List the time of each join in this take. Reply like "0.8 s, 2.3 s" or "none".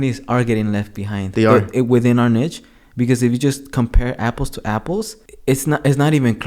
none